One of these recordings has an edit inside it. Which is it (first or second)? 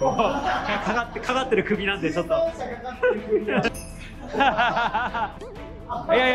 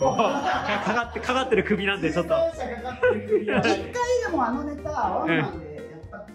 first